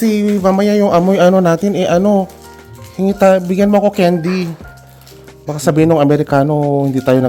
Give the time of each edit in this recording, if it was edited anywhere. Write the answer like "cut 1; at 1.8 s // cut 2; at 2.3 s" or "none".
none